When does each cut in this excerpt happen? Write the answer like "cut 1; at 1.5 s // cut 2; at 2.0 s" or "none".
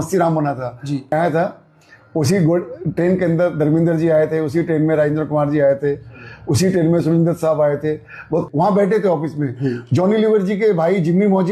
cut 1; at 1.1 s // cut 2; at 8.5 s